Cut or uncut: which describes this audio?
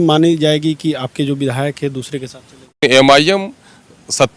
cut